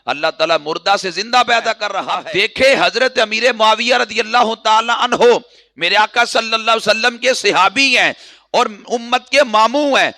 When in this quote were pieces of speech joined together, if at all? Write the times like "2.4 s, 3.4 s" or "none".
2.2 s